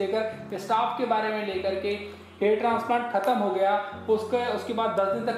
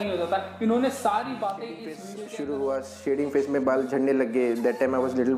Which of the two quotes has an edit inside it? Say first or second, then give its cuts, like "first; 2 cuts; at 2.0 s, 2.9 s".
second; 1 cut; at 2.0 s